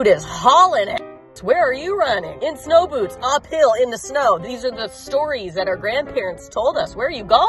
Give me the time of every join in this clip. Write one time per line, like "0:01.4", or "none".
none